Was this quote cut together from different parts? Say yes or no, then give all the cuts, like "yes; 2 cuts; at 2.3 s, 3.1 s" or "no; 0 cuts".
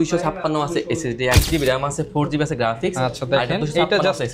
yes; 1 cut; at 1.4 s